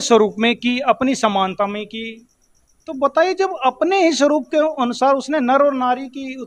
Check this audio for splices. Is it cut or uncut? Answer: uncut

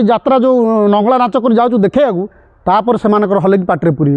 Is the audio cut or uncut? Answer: uncut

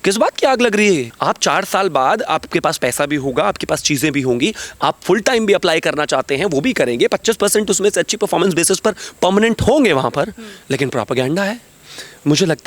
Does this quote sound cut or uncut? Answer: cut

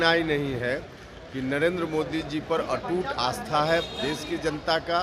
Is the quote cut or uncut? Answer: uncut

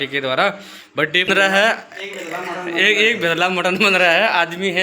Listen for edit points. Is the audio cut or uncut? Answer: cut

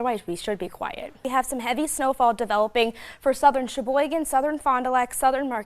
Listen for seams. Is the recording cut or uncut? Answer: cut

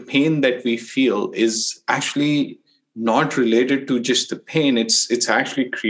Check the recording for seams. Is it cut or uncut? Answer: uncut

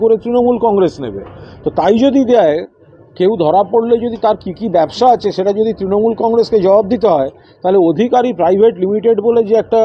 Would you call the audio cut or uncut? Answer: uncut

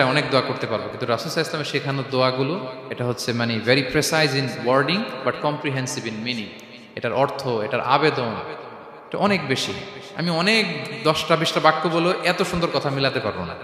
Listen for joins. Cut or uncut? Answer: uncut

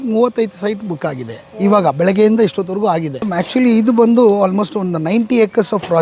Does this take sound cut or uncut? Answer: cut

